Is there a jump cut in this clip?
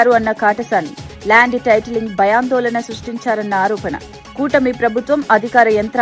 no; 0 cuts

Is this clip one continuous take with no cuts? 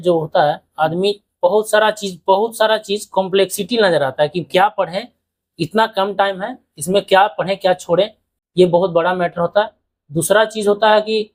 yes; 0 cuts

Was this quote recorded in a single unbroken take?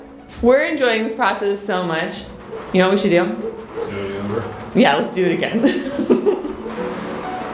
yes; 0 cuts

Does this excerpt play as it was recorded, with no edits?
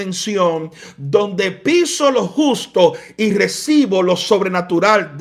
yes; 0 cuts

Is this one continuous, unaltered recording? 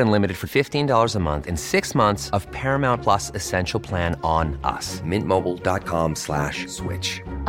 yes; 0 cuts

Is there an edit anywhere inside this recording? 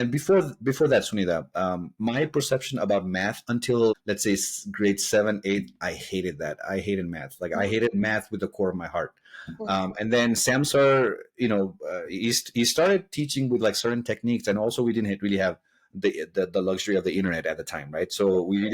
yes; 1 cut; at 4.0 s

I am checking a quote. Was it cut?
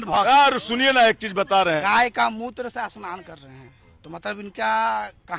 yes; 2 cuts; at 1.8 s, 3.8 s

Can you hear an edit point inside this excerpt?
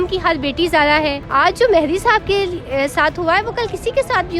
yes; 1 cut; at 1.2 s

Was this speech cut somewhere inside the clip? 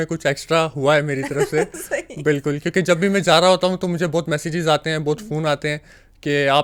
no; 0 cuts

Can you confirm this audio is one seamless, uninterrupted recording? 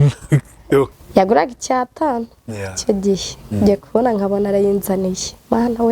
no; 1 cut; at 1.0 s

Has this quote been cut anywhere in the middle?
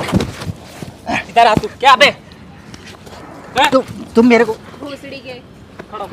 no; 0 cuts

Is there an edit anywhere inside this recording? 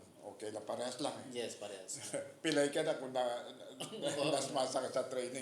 no; 0 cuts

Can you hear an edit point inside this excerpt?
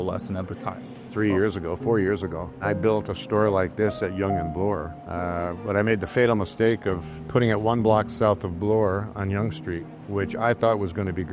no; 0 cuts

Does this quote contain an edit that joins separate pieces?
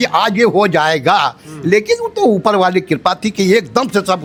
no; 0 cuts

